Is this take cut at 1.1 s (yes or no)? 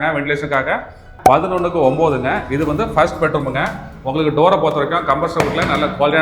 yes